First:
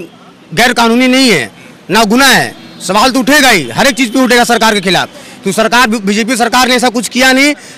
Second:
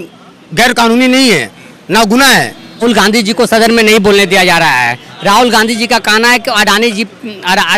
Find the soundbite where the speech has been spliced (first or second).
second